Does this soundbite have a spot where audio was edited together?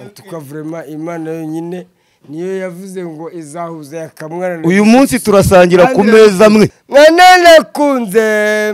yes; 1 cut; at 6.8 s

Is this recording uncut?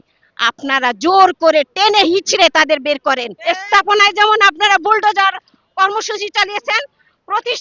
no; 1 cut; at 3.3 s

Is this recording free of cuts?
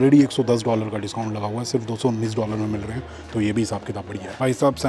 yes; 0 cuts

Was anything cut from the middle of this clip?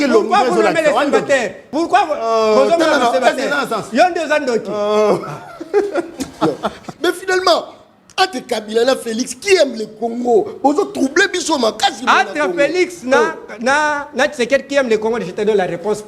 yes; 2 cuts; at 1.6 s, 6.8 s

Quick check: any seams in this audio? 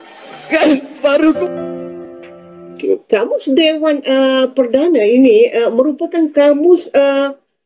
yes; 1 cut; at 2.8 s

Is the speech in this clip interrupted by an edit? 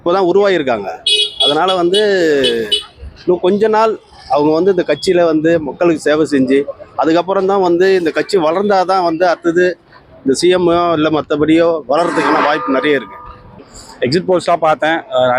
yes; 1 cut; at 13.8 s

